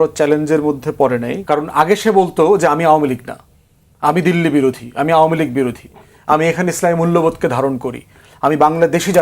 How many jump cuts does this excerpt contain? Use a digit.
1